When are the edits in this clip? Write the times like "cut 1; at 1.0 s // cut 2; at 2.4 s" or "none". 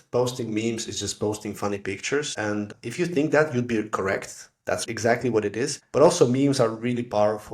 cut 1; at 2.6 s // cut 2; at 4.8 s // cut 3; at 5.8 s

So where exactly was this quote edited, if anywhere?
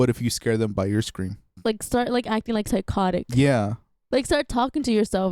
cut 1; at 1.4 s // cut 2; at 4.0 s

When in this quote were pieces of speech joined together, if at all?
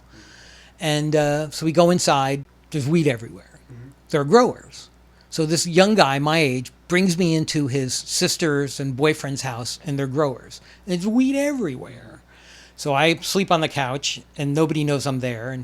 cut 1; at 2.6 s

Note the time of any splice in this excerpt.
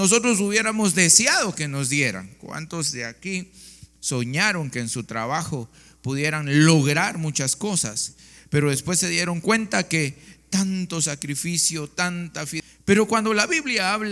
cut 1; at 12.6 s

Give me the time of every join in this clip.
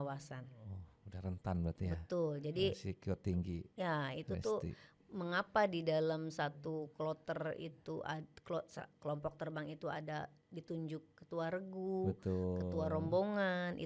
none

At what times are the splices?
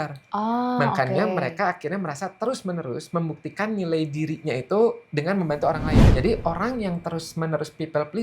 cut 1; at 6.1 s

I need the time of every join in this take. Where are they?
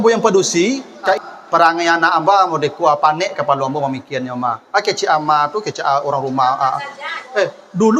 cut 1; at 1.2 s

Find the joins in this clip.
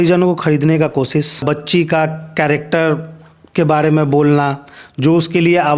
cut 1; at 1.4 s

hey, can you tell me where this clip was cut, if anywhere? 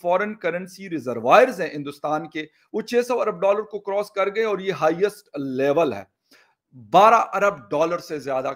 cut 1; at 6.3 s

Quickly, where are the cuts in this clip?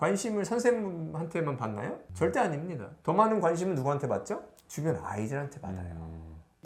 none

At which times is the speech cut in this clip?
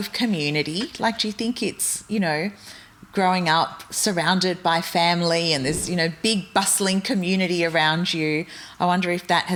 none

